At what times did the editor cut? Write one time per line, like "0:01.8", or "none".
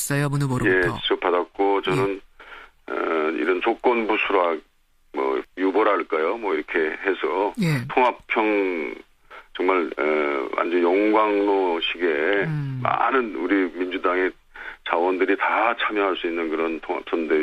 0:02.3